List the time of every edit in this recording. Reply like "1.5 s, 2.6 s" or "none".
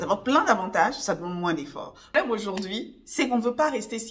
2.1 s